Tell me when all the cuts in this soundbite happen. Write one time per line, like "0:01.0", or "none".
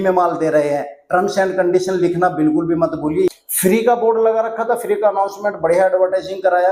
0:03.3